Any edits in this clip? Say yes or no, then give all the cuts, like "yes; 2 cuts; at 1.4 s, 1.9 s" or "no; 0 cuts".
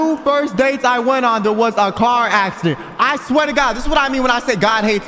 no; 0 cuts